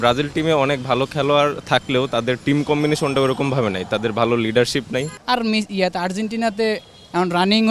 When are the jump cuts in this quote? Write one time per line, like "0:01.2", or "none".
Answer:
0:05.2